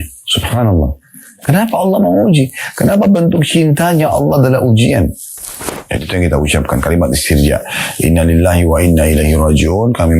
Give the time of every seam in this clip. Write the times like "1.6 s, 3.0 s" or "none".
5.7 s